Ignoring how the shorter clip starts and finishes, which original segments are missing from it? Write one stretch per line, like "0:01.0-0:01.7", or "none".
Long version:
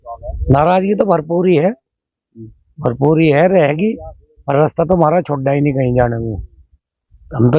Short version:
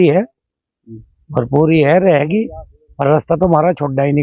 none

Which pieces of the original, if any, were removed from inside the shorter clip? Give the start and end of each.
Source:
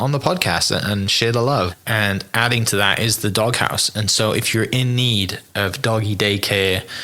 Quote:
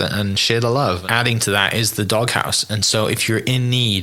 0:01.7-0:02.3

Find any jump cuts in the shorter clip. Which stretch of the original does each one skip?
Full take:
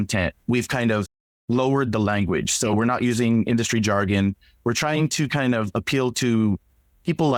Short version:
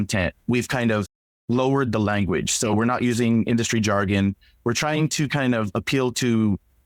none

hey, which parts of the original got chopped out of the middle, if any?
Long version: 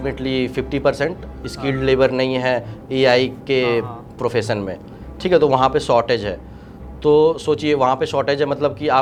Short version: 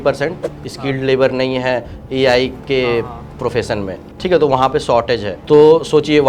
0:04.8-0:05.0
0:06.3-0:06.9

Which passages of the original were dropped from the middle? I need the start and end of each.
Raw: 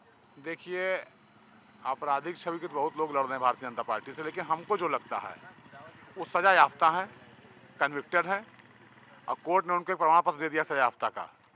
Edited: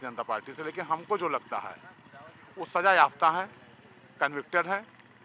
none

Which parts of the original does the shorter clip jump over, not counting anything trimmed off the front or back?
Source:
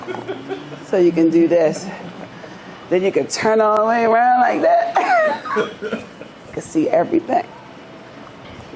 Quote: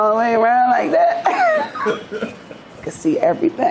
none

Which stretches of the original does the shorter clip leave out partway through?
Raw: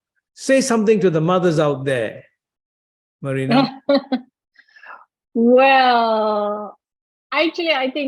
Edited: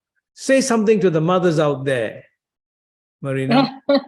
none

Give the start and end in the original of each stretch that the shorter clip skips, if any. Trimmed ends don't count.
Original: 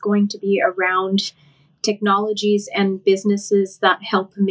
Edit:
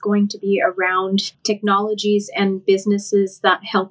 0:01.3-0:01.7

